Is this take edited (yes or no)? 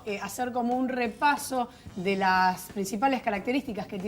yes